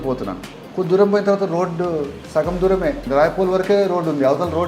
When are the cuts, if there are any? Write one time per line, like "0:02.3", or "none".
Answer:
0:02.2
0:03.0